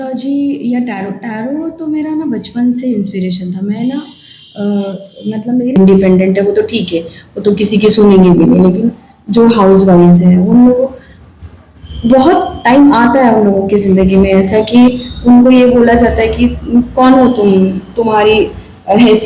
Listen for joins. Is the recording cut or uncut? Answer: cut